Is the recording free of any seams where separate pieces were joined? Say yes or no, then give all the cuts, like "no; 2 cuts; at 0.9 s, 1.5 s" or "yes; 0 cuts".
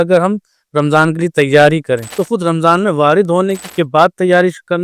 no; 2 cuts; at 2.1 s, 3.6 s